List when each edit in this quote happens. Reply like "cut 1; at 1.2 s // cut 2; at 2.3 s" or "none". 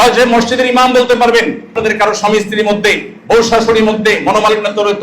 cut 1; at 1.8 s

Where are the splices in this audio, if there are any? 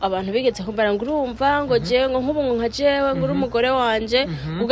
none

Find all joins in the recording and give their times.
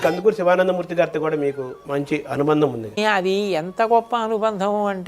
cut 1; at 1.7 s // cut 2; at 3.0 s

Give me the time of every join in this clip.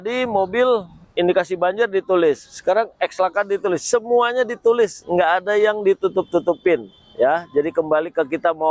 none

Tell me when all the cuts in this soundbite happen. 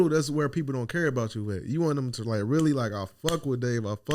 none

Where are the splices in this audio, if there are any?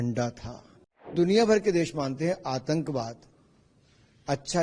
cut 1; at 1.1 s

